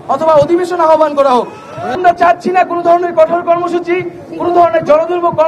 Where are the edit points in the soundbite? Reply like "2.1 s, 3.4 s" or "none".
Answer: 2.0 s

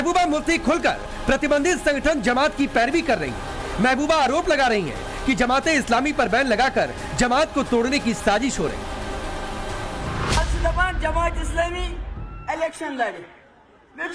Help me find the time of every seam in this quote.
1.1 s

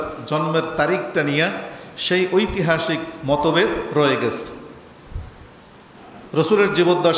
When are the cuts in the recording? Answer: none

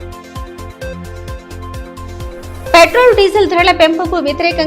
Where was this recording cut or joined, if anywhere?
1.3 s

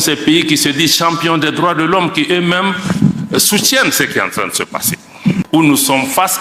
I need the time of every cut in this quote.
5.4 s

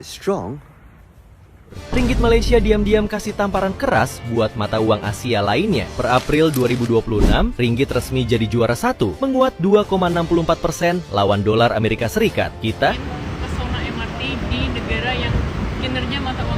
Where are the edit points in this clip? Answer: 1.8 s, 13.0 s

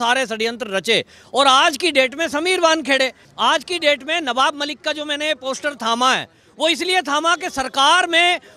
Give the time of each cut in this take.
3.2 s

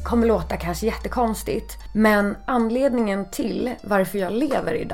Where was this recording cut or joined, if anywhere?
1.8 s, 2.4 s

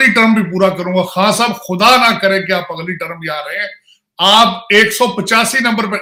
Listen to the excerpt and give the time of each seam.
none

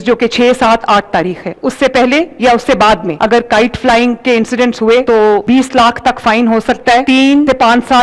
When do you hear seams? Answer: 3.1 s, 5.4 s

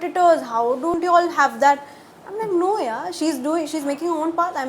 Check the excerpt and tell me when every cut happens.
1.0 s

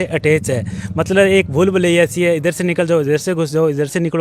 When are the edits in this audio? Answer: none

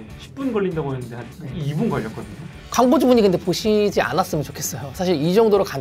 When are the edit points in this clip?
2.5 s

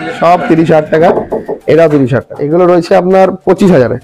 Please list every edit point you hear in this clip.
2.3 s

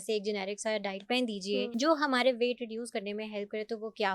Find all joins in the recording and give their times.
1.7 s

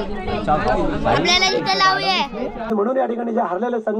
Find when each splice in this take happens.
2.7 s

